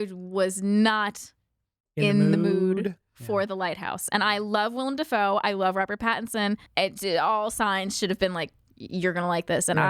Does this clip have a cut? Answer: yes; 1 cut; at 6.7 s

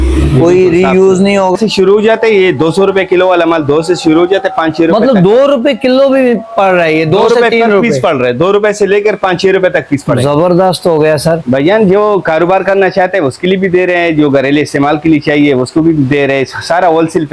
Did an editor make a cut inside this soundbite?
yes; 2 cuts; at 1.6 s, 11.4 s

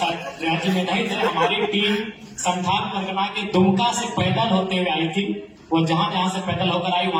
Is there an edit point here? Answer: no; 0 cuts

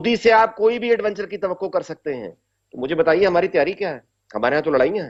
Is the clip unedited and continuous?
yes; 0 cuts

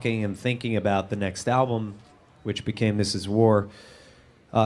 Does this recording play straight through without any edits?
yes; 0 cuts

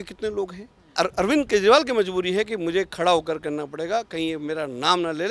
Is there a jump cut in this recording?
yes; 1 cut; at 0.9 s

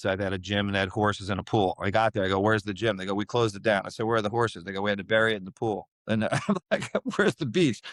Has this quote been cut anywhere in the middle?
no; 0 cuts

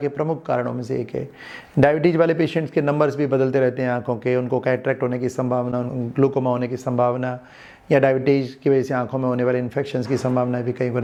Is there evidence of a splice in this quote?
no; 0 cuts

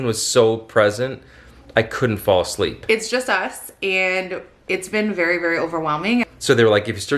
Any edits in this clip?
yes; 2 cuts; at 2.8 s, 6.3 s

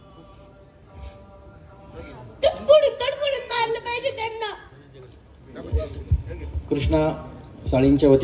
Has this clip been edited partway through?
no; 0 cuts

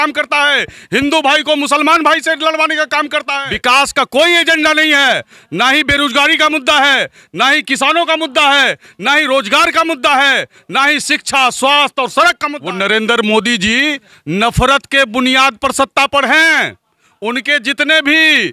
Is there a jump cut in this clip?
yes; 2 cuts; at 3.4 s, 12.5 s

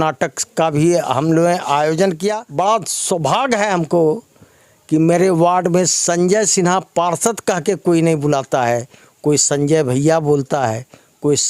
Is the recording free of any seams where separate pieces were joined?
no; 1 cut; at 2.4 s

